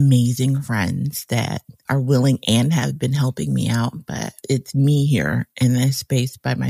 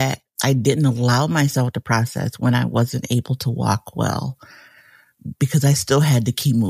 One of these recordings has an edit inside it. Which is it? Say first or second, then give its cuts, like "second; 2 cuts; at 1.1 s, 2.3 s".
first; 1 cut; at 4.4 s